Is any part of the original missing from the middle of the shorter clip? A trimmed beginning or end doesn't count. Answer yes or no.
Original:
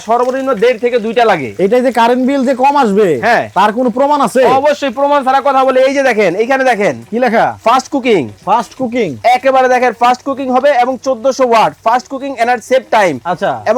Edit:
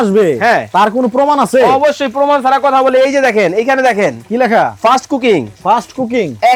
no